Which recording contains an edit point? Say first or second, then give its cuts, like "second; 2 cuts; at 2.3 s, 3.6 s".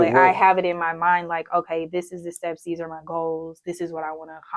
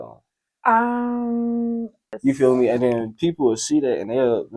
second; 1 cut; at 2.1 s